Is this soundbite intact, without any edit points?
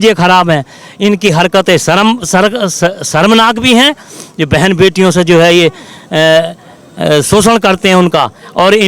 yes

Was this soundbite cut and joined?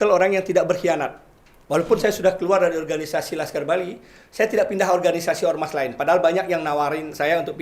no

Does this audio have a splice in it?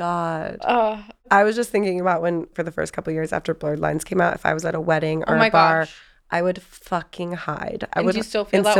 yes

